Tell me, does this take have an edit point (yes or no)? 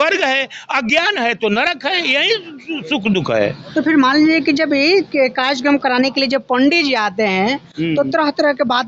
no